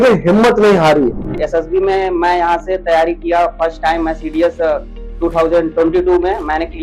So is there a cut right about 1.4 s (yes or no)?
yes